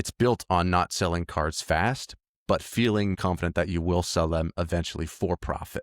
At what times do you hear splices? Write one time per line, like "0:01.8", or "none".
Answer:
0:03.2